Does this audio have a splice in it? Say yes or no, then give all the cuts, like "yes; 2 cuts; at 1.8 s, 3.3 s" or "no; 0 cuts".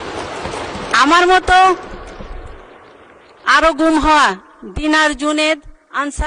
no; 0 cuts